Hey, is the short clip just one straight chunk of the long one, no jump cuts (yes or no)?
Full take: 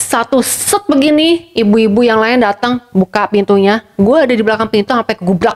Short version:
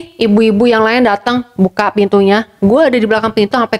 yes